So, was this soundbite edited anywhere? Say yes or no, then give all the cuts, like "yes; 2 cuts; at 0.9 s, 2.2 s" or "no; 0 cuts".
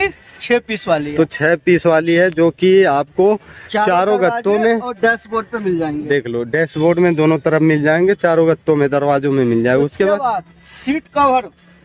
no; 0 cuts